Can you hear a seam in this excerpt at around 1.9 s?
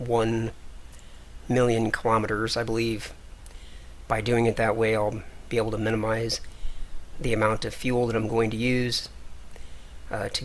no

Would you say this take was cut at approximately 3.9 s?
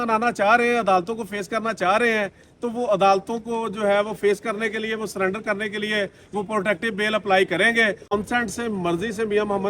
no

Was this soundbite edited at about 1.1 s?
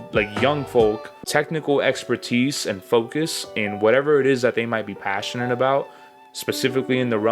yes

